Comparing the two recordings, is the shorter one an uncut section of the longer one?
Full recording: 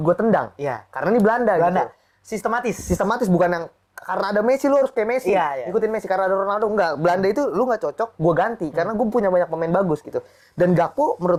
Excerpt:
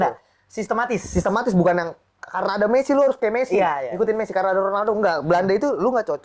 yes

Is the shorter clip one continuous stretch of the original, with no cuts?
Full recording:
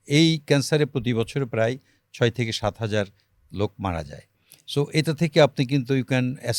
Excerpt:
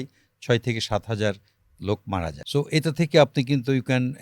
no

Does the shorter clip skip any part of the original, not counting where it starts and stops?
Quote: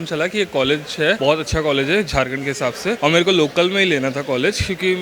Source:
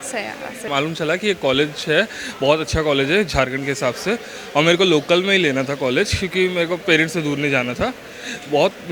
yes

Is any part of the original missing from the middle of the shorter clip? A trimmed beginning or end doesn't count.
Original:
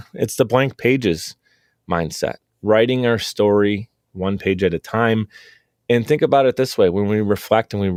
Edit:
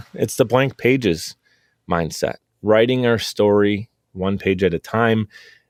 no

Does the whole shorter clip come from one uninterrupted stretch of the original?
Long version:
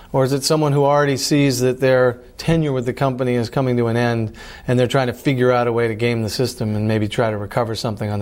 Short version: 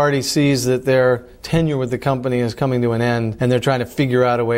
no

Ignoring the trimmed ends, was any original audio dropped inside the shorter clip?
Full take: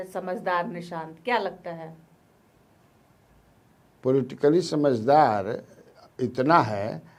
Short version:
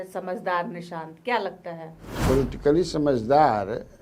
yes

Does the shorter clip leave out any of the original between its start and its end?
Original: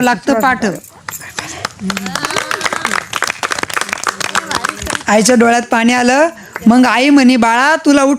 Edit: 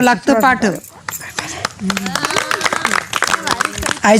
yes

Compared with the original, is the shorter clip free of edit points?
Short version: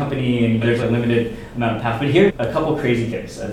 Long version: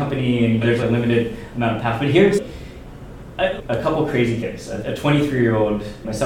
no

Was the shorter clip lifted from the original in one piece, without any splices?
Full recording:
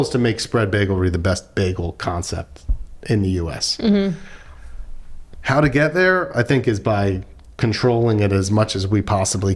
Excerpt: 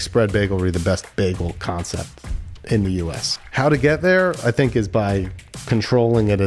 no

